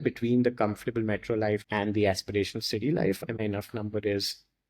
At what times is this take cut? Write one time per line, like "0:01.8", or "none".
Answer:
0:03.4